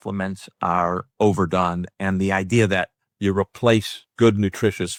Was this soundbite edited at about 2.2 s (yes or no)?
no